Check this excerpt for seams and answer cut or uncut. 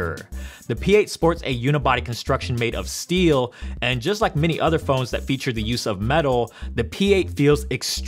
cut